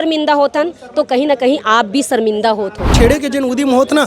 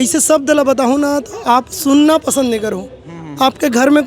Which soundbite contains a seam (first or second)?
first